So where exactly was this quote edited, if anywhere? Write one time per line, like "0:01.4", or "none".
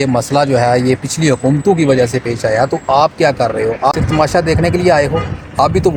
none